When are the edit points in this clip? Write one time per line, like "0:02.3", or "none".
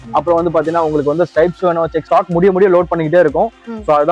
0:02.1